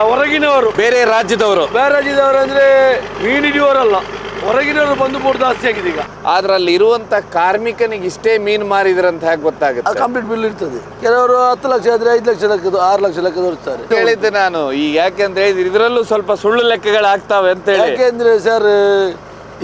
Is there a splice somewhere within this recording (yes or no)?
yes